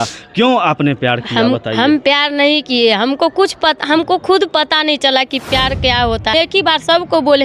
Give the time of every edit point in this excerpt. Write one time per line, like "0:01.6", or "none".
0:06.3